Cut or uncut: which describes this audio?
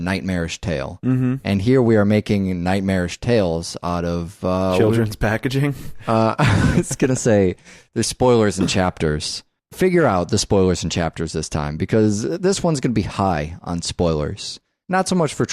uncut